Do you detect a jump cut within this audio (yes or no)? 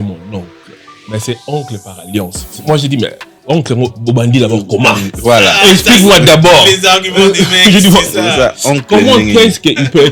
no